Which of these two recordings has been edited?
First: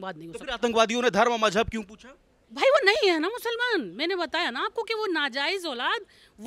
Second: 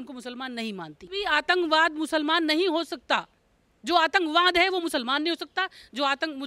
second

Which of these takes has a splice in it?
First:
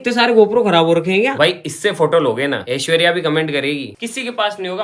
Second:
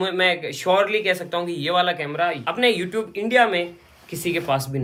first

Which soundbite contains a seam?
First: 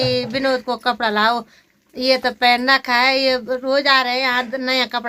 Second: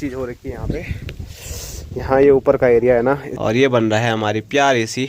second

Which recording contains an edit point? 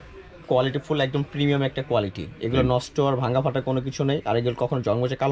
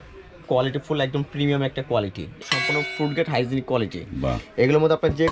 second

